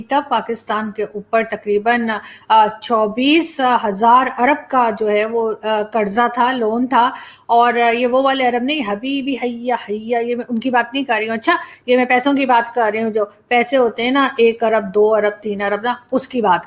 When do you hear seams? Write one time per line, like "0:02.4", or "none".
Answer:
none